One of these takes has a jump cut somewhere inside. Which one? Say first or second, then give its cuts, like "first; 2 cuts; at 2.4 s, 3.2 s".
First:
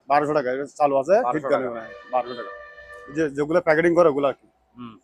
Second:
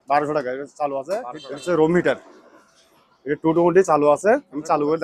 second; 1 cut; at 1.3 s